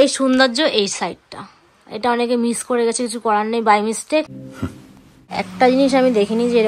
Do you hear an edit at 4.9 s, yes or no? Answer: yes